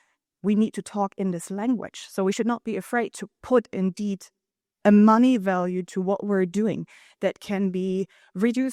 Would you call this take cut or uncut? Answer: uncut